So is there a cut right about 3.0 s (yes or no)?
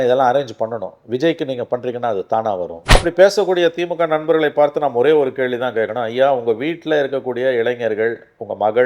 yes